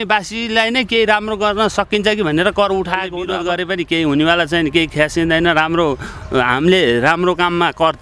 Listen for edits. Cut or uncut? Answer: cut